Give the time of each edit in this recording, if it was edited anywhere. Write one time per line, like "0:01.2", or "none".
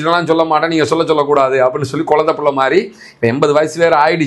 none

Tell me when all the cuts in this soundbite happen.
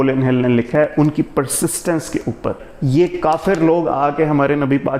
0:02.7

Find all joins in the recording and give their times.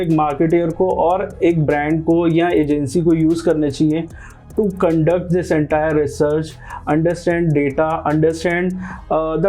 none

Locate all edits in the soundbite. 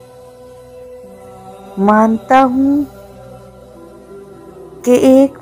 0:01.8

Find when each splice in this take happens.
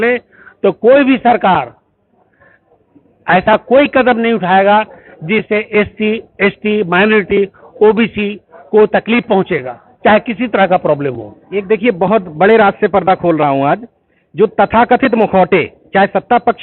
none

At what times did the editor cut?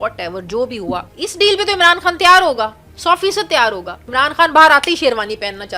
0:01.1
0:04.1

